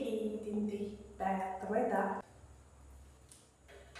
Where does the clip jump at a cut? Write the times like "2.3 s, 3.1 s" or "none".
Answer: 2.2 s